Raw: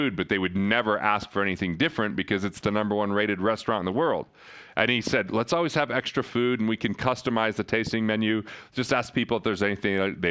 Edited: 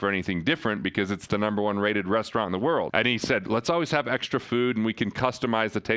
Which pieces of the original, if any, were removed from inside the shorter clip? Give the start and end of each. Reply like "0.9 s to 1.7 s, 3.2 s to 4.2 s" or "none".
4.2 s to 4.7 s